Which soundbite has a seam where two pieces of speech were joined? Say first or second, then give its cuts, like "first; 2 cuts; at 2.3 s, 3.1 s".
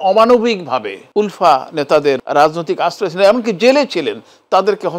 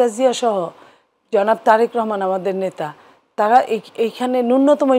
first; 2 cuts; at 1.0 s, 2.2 s